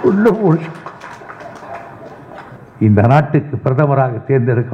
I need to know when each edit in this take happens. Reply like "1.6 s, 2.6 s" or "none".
2.5 s